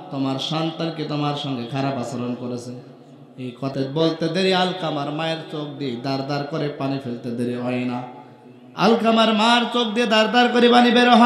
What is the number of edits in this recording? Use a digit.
1